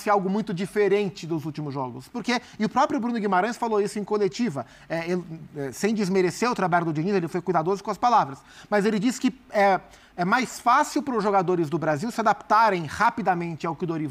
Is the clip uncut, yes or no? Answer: yes